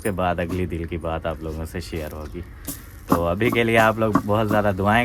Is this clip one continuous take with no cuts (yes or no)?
yes